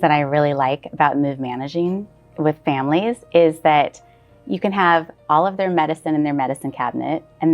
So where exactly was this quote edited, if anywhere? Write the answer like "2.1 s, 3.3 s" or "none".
none